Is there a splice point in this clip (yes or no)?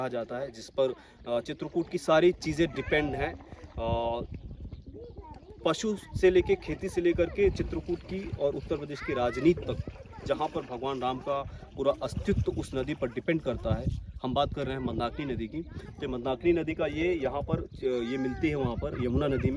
no